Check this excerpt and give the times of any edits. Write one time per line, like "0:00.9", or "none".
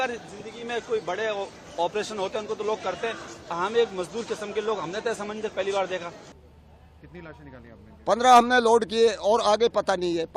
0:06.2